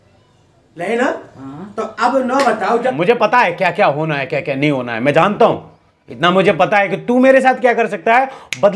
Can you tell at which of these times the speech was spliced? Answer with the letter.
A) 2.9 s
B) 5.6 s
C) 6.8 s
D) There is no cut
A